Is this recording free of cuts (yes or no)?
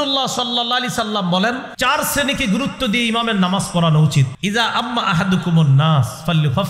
no